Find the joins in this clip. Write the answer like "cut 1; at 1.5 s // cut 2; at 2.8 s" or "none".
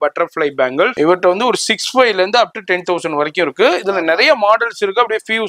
cut 1; at 0.9 s